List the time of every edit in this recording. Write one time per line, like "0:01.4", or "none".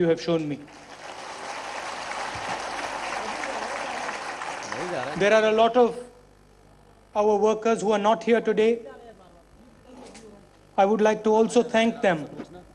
0:02.7